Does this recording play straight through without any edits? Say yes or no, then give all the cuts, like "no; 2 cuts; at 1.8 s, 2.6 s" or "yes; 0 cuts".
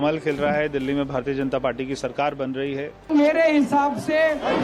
no; 1 cut; at 3.0 s